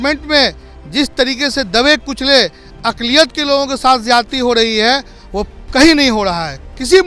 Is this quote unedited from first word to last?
yes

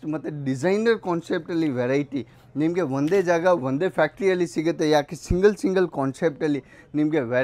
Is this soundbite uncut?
yes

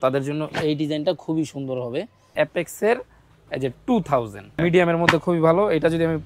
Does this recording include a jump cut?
yes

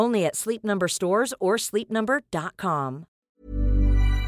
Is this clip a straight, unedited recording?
no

